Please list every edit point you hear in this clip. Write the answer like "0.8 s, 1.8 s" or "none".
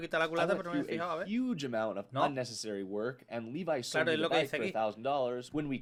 none